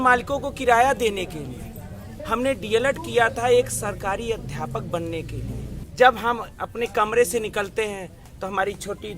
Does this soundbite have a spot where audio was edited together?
yes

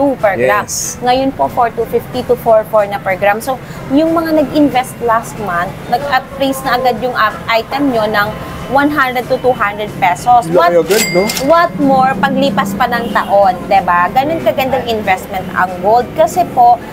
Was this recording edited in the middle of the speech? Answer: no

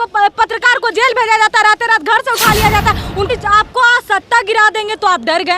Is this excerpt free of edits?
no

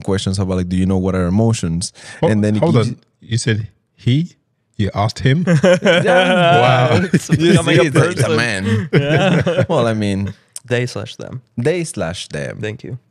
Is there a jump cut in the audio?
no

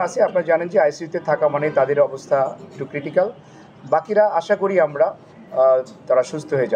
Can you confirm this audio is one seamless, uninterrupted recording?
yes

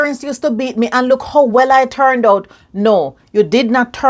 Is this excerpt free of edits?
yes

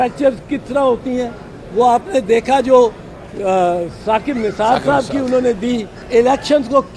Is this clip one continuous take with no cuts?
no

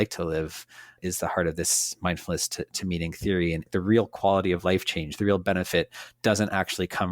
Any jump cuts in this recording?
yes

